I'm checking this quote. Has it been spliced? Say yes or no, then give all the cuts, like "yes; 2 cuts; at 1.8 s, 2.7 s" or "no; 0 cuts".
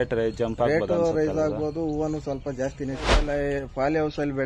yes; 1 cut; at 3.1 s